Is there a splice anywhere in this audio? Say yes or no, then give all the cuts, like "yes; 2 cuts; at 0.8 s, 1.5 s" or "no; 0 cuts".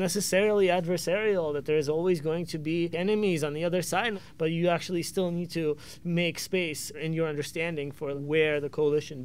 yes; 4 cuts; at 2.9 s, 4.2 s, 7.0 s, 8.2 s